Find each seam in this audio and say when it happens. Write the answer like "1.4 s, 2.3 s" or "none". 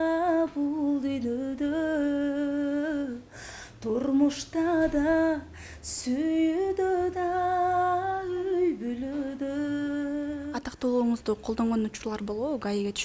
10.6 s